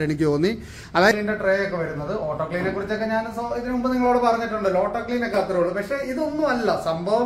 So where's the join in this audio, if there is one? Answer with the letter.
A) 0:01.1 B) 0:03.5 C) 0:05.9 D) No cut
A